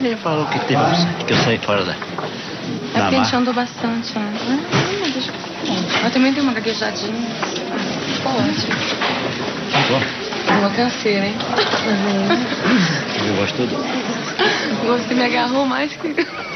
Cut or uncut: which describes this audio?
uncut